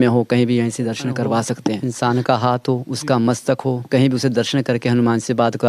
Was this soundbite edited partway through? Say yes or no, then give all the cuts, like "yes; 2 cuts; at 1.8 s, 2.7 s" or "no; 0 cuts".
yes; 1 cut; at 1.9 s